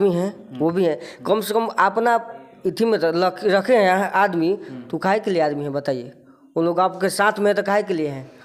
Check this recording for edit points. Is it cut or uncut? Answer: uncut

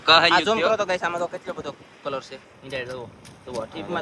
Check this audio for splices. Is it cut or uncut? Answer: uncut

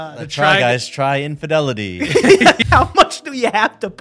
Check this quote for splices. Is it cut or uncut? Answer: cut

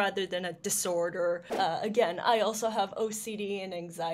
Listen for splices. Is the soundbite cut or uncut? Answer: cut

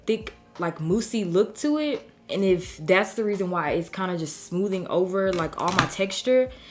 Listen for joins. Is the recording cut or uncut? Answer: uncut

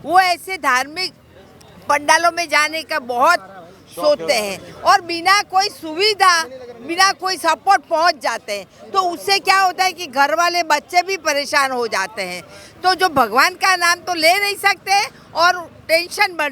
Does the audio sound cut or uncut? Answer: uncut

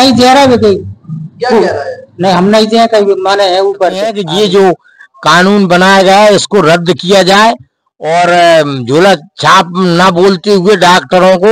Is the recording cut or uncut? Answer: cut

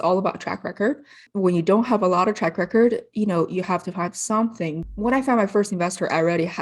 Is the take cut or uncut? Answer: cut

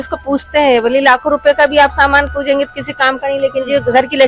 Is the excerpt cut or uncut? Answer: uncut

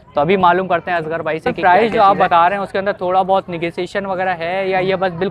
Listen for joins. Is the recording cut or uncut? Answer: cut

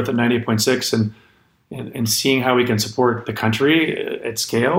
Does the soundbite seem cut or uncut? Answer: uncut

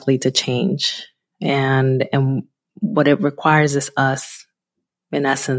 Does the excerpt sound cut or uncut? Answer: uncut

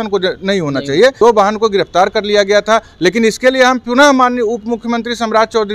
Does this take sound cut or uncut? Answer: cut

